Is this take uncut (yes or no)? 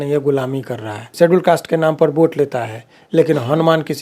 no